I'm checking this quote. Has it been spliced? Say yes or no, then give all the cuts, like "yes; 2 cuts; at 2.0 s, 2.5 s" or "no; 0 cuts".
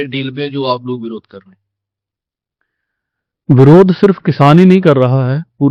no; 0 cuts